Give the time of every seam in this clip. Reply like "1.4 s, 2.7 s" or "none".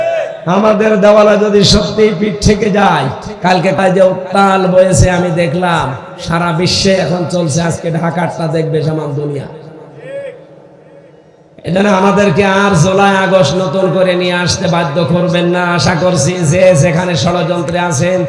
3.7 s